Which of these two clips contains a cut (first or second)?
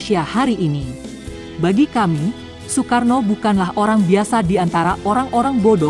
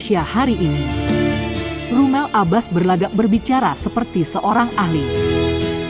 first